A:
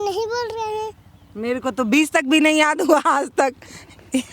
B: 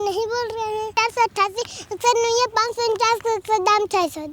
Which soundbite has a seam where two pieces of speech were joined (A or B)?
B